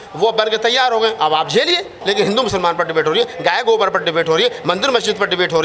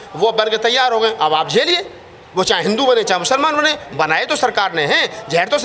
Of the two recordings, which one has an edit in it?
first; 1 cut; at 2.0 s

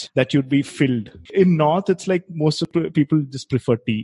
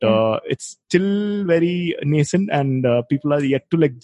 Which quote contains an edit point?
first; 2 cuts; at 1.2 s, 2.7 s

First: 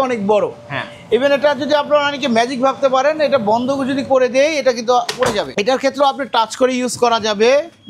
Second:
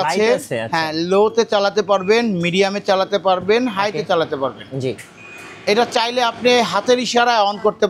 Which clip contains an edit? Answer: first; 1 cut; at 5.5 s

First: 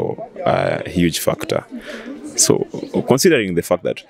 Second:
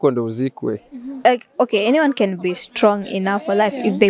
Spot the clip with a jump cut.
second; 1 cut; at 1.2 s

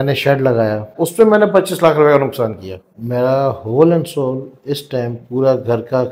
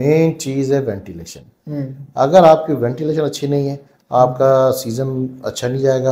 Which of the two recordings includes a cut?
first; 2 cuts; at 1.0 s, 2.9 s

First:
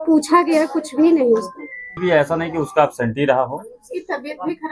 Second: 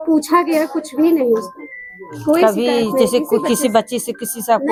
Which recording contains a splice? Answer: first; 1 cut; at 2.0 s

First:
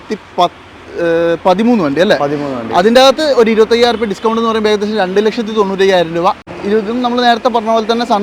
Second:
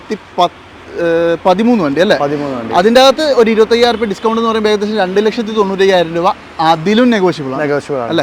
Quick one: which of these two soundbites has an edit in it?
first; 1 cut; at 6.5 s

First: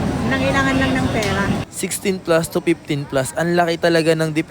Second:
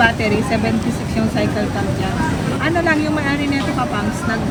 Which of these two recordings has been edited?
first; 1 cut; at 1.6 s

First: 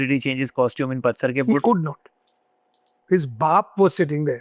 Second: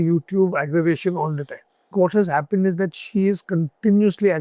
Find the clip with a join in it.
second; 1 cut; at 1.9 s

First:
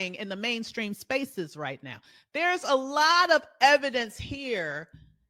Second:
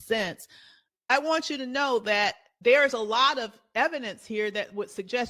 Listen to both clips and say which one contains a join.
second; 2 cuts; at 2.5 s, 3.6 s

